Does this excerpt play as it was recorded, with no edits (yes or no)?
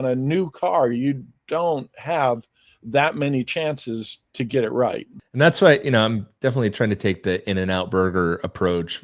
no